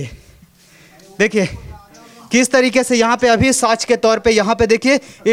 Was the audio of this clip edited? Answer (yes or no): no